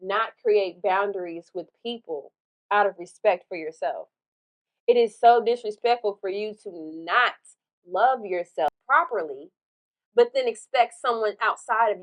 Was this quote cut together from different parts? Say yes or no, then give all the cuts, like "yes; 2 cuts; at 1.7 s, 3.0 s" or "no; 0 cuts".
yes; 1 cut; at 8.7 s